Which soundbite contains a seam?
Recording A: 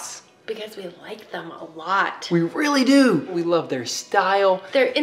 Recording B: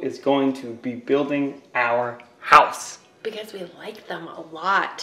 A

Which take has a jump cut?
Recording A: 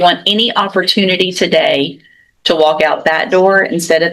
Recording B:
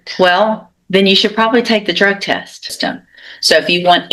B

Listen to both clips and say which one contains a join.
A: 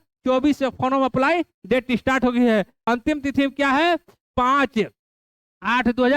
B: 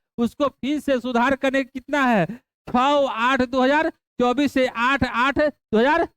A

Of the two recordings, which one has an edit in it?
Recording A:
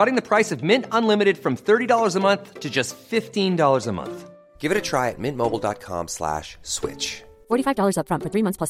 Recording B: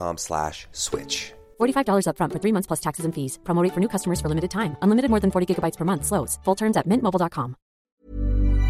B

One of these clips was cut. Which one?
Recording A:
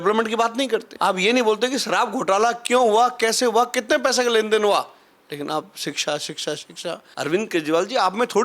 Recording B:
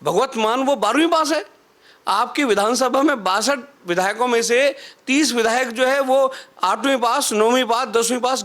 A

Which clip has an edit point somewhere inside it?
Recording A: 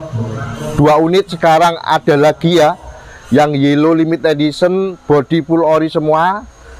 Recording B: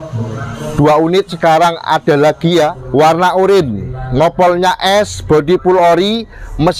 B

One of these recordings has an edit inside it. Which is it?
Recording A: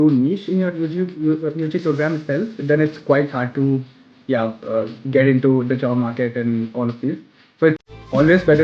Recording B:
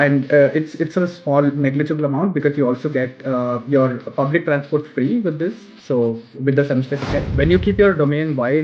B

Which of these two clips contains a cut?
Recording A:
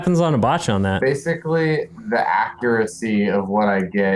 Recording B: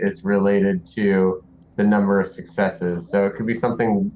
A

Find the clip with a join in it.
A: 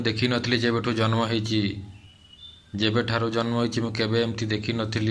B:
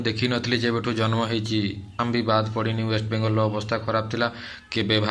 B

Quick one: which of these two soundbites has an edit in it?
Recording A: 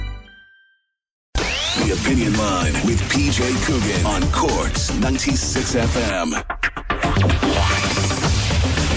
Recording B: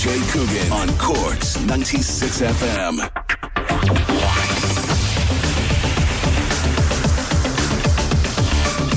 A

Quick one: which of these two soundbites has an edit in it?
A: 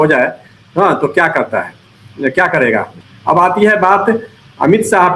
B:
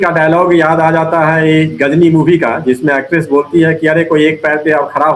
A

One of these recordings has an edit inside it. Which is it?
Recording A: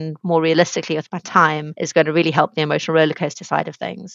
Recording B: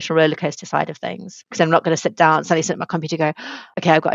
A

